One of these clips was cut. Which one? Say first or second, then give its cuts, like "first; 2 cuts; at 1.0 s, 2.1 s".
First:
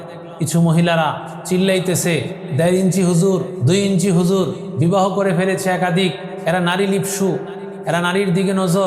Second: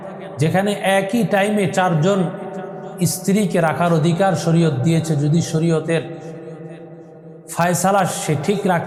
first; 5 cuts; at 1.3 s, 2.4 s, 3.5 s, 4.6 s, 6.3 s